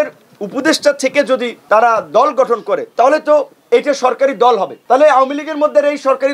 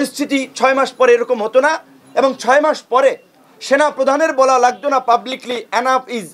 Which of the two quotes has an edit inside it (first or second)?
first